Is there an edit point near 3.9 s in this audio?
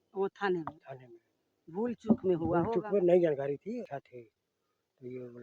yes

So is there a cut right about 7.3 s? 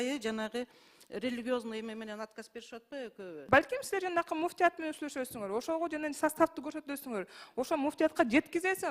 no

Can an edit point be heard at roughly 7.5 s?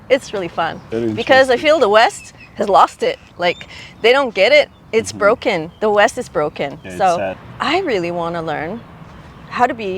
yes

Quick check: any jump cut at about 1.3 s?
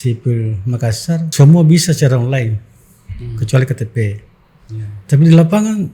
yes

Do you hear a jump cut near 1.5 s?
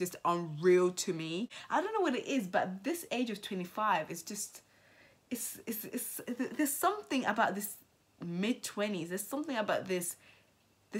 yes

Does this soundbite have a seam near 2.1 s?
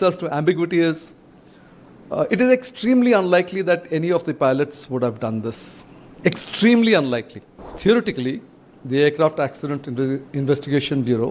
no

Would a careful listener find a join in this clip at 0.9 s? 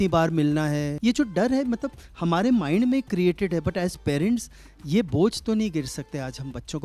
yes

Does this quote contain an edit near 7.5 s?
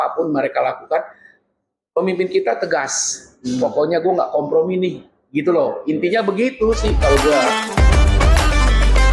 yes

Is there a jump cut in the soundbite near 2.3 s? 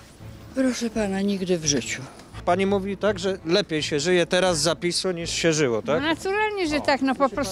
yes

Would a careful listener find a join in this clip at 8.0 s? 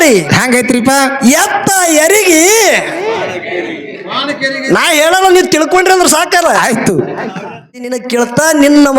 yes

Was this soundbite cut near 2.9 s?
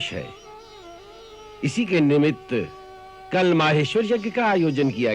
no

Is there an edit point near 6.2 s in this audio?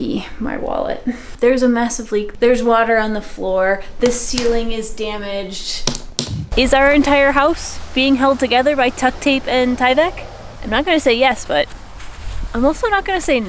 yes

